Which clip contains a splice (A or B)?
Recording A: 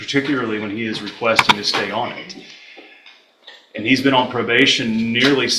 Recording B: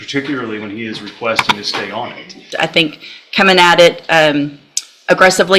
B